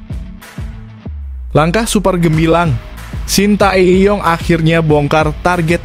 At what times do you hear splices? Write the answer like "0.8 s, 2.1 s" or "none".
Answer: 1.1 s